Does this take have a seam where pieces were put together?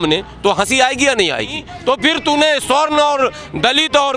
yes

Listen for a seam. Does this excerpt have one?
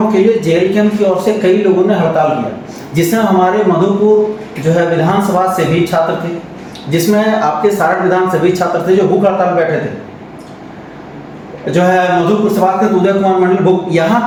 no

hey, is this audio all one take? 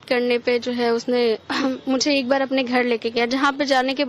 yes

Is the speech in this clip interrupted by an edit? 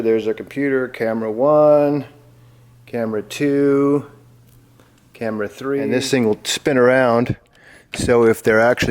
yes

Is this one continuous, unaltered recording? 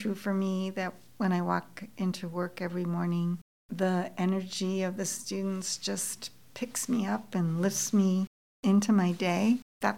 yes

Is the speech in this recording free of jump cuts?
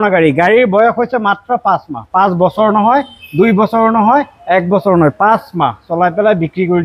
yes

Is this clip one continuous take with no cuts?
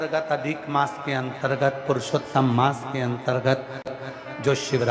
no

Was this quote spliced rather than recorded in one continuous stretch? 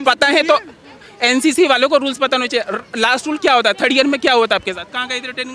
no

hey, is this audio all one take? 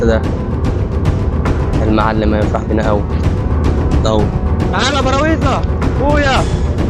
yes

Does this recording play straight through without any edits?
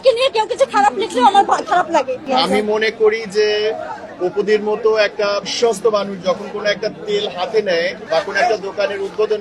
no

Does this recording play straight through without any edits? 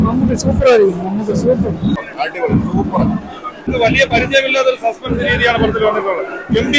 no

